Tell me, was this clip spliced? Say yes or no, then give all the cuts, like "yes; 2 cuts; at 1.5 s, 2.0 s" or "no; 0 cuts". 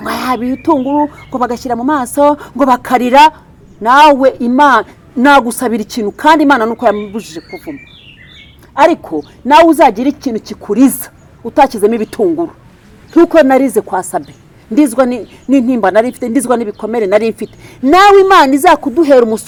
no; 0 cuts